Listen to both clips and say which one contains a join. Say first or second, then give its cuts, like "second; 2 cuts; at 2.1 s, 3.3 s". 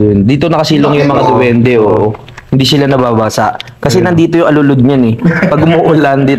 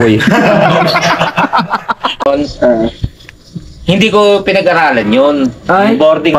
second; 1 cut; at 2.3 s